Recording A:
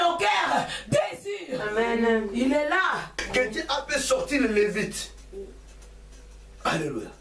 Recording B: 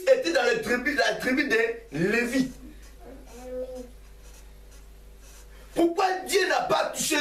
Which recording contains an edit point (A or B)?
A